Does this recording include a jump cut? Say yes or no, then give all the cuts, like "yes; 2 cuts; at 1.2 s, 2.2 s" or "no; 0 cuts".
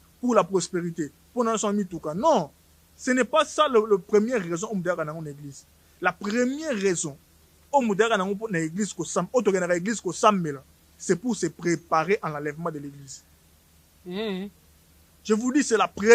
no; 0 cuts